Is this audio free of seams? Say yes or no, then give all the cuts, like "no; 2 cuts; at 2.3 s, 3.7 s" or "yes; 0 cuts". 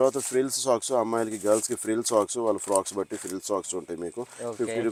yes; 0 cuts